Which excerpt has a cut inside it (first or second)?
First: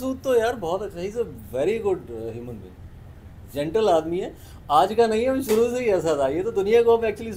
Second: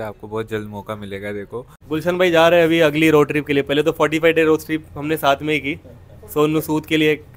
second